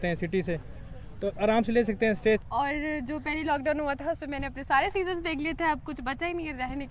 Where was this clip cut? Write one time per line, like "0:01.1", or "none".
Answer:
0:02.4